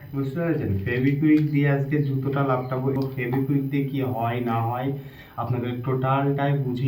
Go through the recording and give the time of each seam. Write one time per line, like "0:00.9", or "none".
0:02.9